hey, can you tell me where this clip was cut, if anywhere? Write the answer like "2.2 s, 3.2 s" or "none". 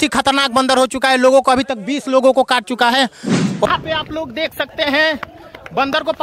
3.7 s